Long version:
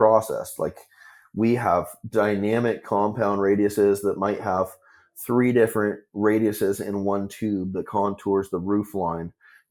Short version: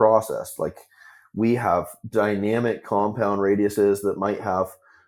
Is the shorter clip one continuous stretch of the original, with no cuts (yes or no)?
yes